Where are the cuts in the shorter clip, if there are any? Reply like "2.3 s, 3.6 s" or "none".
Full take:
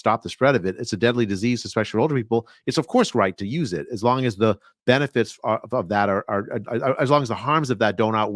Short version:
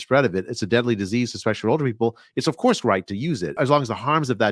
3.6 s

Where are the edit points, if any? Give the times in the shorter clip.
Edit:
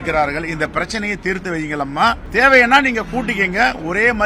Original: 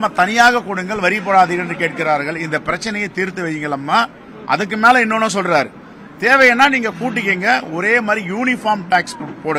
2.2 s

